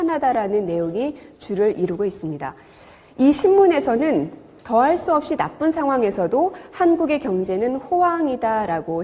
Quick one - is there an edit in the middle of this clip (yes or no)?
yes